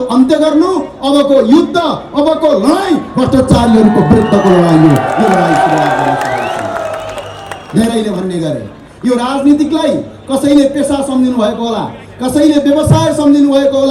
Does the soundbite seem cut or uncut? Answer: uncut